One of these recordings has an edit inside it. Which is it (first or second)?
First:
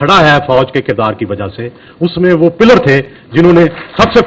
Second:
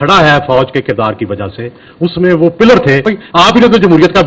second